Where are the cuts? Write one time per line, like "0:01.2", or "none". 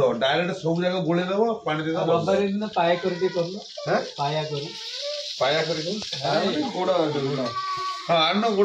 none